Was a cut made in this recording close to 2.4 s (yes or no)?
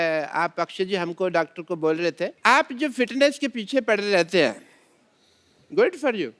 yes